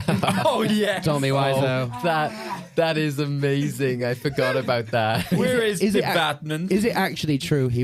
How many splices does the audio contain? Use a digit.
0